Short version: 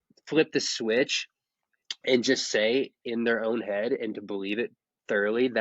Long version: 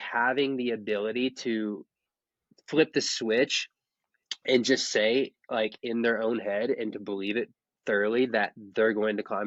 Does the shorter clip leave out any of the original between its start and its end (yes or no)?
yes